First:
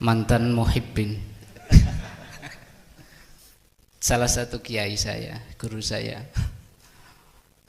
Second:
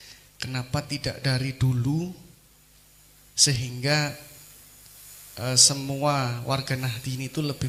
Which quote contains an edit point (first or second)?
first